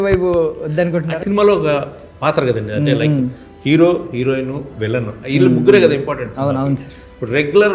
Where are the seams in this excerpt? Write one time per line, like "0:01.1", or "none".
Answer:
0:01.2